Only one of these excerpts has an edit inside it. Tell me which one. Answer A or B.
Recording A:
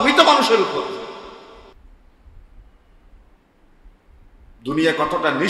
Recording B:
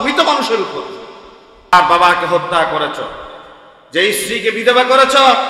B